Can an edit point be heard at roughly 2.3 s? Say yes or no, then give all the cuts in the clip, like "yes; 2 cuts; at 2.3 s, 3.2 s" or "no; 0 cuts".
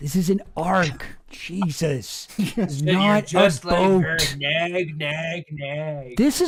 no; 0 cuts